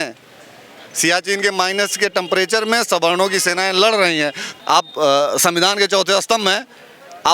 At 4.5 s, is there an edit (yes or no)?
yes